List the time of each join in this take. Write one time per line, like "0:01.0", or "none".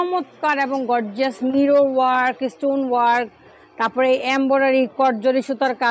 none